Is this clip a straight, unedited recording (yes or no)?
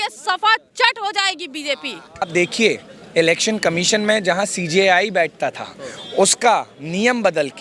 no